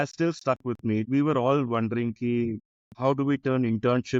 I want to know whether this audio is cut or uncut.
cut